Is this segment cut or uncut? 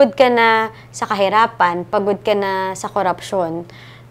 uncut